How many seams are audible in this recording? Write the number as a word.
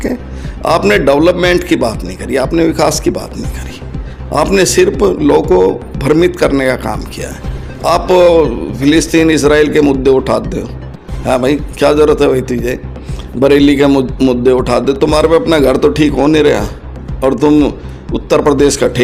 zero